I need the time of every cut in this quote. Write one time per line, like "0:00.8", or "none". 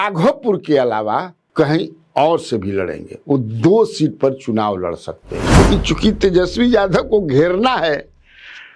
0:05.6